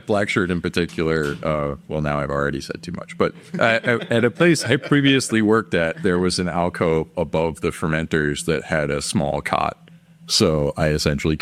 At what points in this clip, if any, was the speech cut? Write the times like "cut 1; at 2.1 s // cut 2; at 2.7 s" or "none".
none